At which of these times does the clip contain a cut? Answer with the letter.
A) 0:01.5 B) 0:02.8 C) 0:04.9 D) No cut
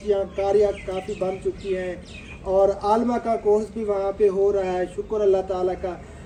D